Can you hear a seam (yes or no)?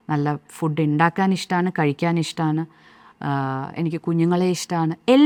no